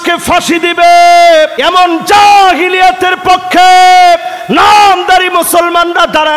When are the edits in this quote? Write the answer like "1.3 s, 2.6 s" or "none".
1.6 s

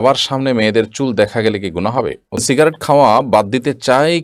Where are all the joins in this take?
2.4 s

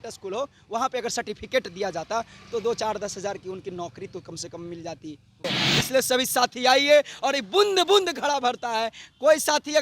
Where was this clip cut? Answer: 5.4 s

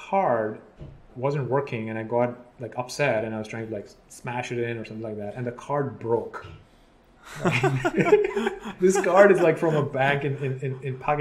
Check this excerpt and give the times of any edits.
1.1 s, 8.6 s

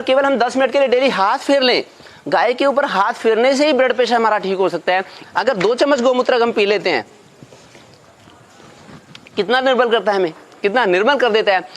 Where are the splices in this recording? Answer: 5.2 s

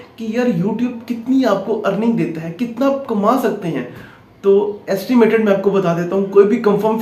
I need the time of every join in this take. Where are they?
none

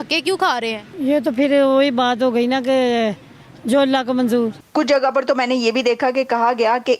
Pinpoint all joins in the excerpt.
0.9 s, 4.6 s

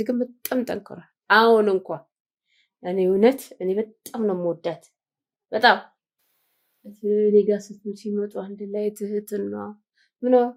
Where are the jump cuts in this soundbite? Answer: none

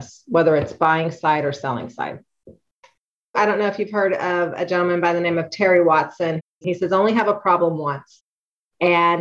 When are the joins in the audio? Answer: 3.4 s, 6.5 s

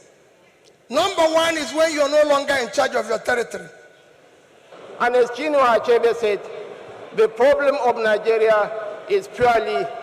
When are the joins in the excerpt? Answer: 4.7 s

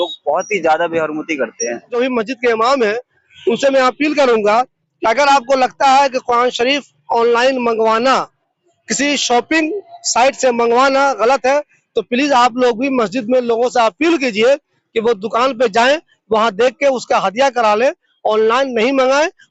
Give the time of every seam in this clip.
1.8 s

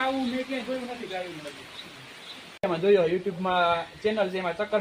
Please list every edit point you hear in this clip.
2.6 s

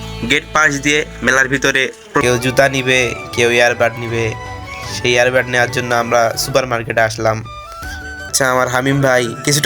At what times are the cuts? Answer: 2.2 s, 8.3 s

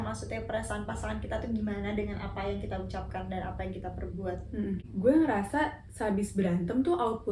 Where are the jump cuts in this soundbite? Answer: 4.9 s

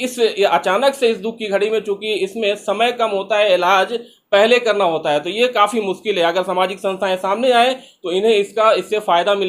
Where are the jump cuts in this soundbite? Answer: none

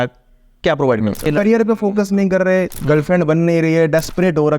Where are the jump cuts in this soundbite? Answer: 1.3 s

